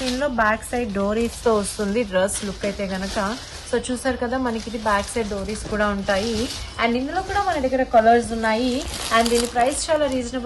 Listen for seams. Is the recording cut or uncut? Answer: uncut